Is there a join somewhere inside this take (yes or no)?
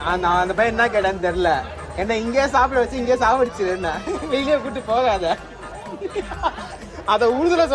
no